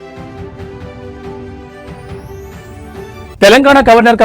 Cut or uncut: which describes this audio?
cut